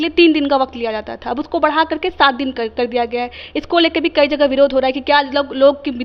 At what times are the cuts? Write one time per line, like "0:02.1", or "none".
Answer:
none

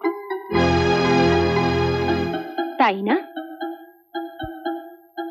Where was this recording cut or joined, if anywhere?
none

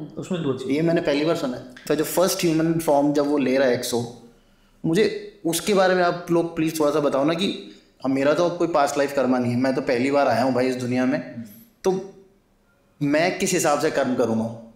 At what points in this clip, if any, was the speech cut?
0:01.8

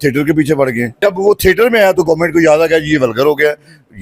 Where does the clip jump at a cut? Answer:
0:01.0

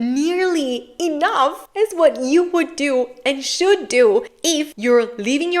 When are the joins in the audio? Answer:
0:00.9
0:01.6
0:04.5

